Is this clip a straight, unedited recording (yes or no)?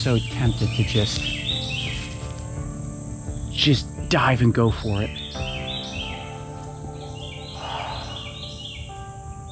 yes